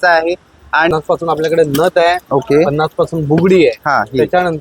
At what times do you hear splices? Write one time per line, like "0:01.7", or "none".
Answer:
0:00.9